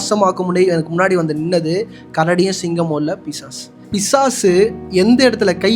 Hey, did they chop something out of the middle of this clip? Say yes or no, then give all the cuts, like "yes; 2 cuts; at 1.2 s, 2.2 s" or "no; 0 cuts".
yes; 2 cuts; at 3.8 s, 4.8 s